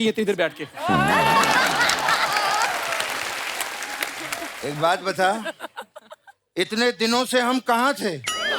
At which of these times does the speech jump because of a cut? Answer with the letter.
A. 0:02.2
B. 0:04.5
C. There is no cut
B